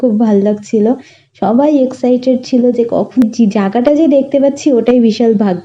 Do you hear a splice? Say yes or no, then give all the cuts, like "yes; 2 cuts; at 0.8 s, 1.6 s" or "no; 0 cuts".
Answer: yes; 1 cut; at 3.2 s